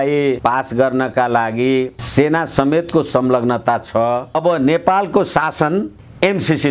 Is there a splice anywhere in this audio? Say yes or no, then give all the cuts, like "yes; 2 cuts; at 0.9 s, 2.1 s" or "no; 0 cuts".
yes; 1 cut; at 4.3 s